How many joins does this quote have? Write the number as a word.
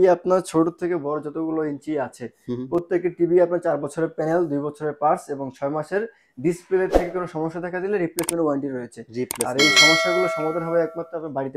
zero